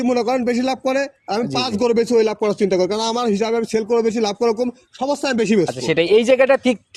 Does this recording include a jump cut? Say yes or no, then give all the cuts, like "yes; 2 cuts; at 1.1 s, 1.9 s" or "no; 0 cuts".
no; 0 cuts